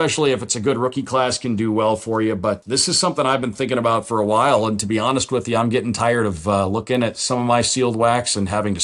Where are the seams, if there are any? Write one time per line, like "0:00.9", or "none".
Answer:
0:02.6